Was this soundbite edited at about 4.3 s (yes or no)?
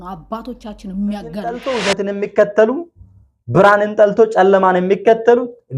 no